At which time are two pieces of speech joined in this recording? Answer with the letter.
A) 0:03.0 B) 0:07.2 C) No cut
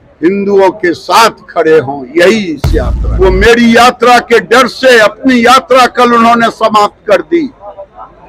A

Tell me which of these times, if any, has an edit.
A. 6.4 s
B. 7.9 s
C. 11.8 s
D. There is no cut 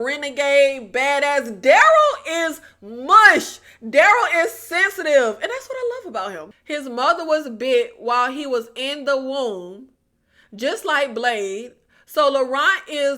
A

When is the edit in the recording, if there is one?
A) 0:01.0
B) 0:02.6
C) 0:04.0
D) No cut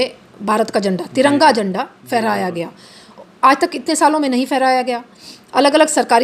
D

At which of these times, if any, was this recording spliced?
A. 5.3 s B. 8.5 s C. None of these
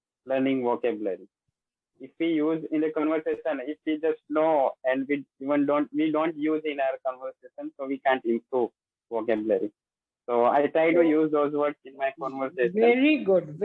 C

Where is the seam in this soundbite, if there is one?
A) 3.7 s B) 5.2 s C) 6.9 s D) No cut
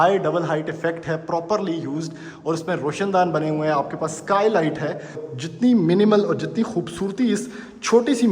B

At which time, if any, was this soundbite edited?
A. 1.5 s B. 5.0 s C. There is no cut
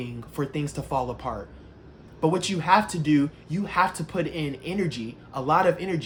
C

